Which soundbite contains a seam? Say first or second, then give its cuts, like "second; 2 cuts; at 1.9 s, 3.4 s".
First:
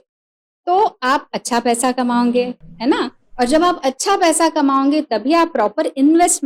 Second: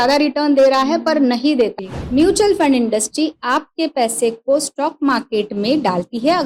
second; 1 cut; at 1.8 s